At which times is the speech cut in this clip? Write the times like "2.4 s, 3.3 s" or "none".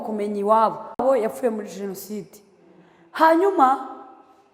none